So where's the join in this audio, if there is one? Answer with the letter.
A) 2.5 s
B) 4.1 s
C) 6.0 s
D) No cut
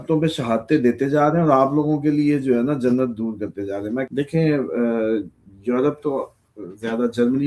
B